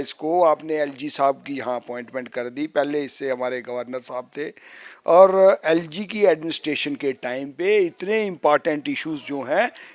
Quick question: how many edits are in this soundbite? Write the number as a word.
zero